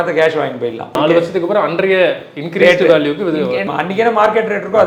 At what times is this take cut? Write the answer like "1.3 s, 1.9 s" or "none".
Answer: 1.0 s, 3.6 s